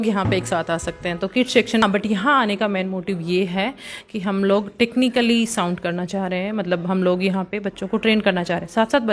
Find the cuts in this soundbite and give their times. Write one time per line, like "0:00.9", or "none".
0:01.8